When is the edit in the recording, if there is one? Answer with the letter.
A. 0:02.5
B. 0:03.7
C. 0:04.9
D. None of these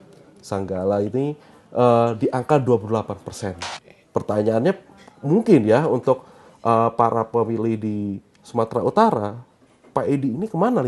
B